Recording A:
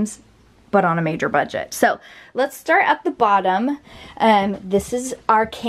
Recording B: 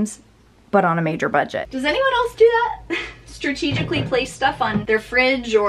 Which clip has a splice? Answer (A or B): B